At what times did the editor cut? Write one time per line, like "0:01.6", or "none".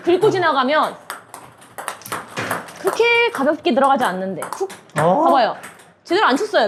none